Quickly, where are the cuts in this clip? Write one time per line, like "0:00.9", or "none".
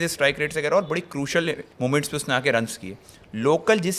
0:01.7